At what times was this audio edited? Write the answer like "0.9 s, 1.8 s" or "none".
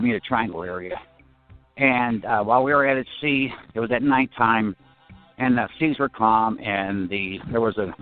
none